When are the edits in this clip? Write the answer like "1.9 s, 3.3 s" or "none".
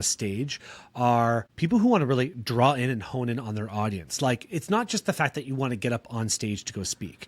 1.5 s